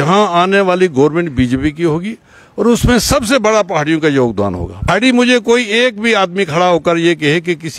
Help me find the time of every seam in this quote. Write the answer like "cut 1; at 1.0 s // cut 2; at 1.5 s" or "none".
cut 1; at 4.9 s